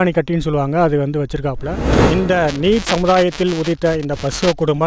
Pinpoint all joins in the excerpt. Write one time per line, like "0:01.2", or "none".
0:01.9